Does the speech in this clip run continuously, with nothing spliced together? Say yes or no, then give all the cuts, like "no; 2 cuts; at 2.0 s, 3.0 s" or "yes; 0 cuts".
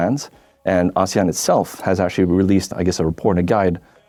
yes; 0 cuts